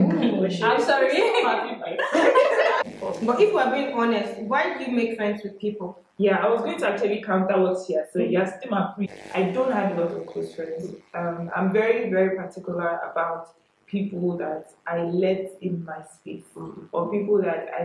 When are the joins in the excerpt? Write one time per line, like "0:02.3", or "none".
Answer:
0:02.8
0:09.0